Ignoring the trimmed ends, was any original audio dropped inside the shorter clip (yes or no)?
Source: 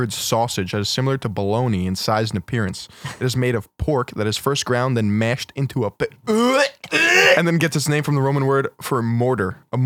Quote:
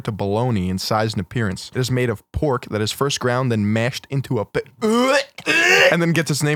yes